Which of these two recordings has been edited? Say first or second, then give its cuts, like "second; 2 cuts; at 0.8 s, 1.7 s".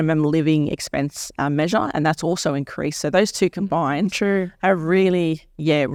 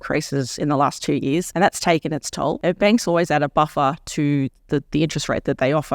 second; 2 cuts; at 1.5 s, 2.6 s